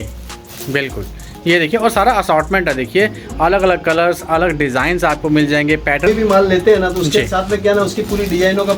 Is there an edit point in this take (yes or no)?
yes